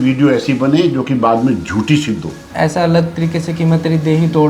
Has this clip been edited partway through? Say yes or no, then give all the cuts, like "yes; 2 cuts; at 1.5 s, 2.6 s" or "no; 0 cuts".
yes; 1 cut; at 2.4 s